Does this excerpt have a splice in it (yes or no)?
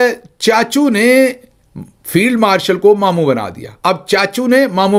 no